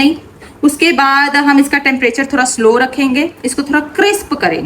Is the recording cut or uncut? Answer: uncut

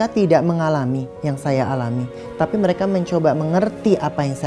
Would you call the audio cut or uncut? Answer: cut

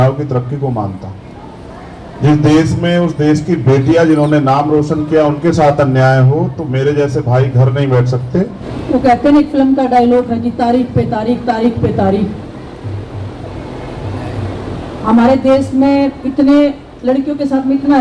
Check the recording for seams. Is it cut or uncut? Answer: cut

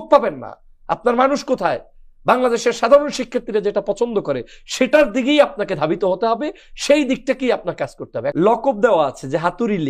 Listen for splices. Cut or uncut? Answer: cut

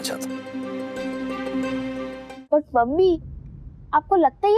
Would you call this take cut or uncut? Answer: cut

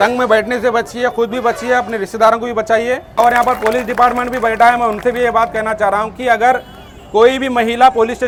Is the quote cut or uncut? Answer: uncut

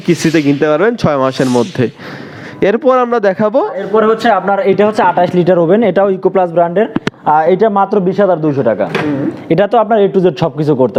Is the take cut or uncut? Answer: uncut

